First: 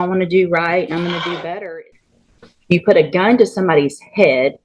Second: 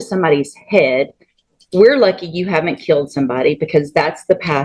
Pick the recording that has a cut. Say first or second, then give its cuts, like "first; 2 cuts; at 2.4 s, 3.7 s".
first; 1 cut; at 1.7 s